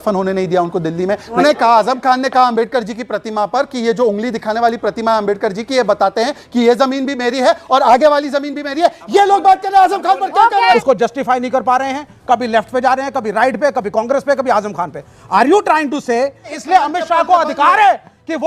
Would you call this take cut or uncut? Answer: cut